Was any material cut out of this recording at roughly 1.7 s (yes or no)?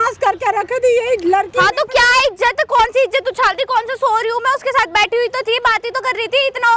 no